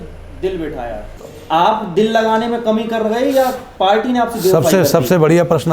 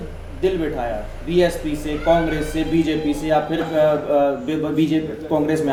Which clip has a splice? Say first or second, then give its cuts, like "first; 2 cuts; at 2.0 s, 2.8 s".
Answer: first; 1 cut; at 1.1 s